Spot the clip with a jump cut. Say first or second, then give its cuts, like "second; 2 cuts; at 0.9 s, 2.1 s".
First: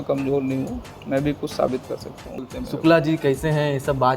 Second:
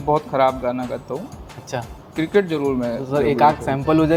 first; 1 cut; at 2.4 s